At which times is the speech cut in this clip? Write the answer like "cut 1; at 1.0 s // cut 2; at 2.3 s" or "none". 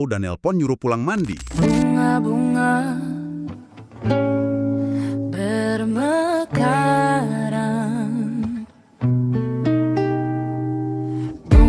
cut 1; at 1.4 s